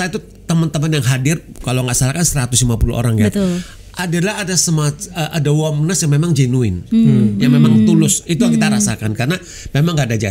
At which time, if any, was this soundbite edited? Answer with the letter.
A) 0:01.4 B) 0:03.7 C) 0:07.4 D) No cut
C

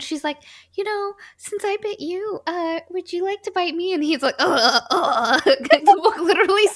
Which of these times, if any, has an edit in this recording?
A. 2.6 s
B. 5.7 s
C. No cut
B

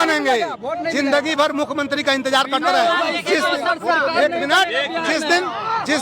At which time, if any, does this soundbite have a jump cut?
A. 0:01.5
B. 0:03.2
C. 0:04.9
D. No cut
D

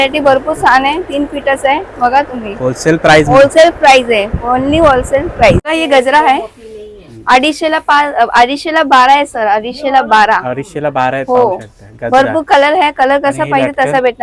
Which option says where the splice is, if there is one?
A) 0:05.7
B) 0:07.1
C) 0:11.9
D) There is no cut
A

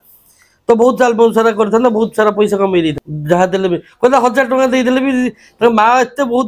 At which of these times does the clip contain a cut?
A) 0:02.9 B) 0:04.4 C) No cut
A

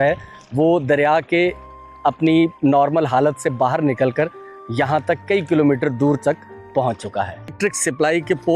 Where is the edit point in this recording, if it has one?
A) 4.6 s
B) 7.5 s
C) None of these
B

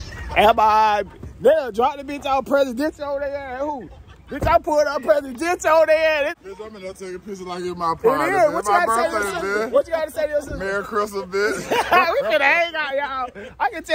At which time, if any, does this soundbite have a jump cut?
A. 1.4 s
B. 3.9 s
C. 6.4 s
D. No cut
C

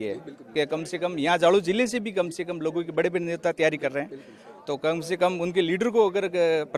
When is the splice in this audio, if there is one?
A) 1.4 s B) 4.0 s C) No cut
C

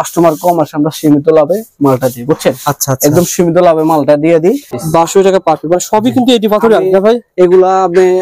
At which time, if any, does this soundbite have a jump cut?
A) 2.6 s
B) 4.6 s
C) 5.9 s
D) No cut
B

